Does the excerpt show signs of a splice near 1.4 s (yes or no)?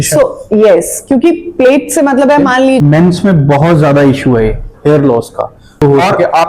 no